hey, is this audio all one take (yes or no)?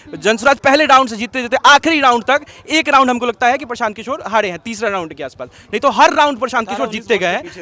yes